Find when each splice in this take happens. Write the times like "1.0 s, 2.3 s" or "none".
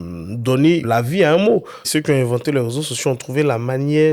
0.8 s, 1.8 s